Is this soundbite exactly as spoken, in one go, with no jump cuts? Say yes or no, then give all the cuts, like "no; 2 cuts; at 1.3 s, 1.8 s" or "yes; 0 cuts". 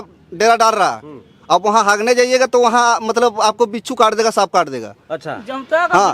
yes; 0 cuts